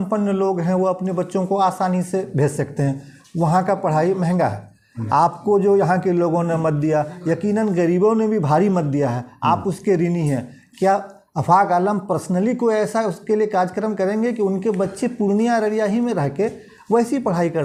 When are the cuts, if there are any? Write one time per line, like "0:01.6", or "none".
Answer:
none